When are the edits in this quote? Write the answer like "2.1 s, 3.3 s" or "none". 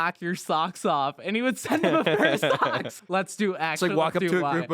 2.9 s